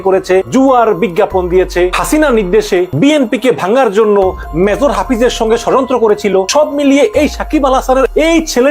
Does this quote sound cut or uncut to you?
cut